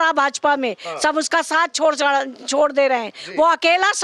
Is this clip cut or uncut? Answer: uncut